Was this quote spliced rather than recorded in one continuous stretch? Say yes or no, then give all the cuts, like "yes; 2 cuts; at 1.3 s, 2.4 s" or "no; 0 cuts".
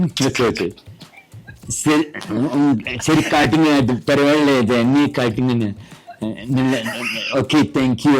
no; 0 cuts